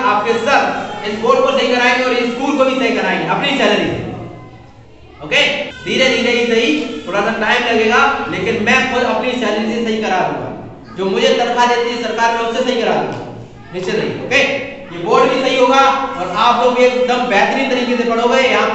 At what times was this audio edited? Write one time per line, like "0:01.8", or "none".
0:05.7